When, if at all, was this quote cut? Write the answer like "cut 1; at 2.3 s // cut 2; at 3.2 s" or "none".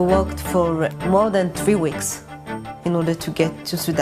cut 1; at 0.9 s